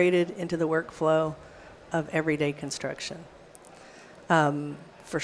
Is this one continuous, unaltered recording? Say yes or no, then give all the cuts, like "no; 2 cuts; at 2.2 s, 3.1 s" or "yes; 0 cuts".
yes; 0 cuts